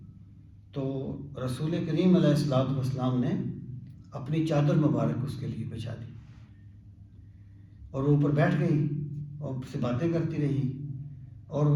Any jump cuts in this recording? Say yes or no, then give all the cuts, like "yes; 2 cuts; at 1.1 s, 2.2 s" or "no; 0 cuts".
no; 0 cuts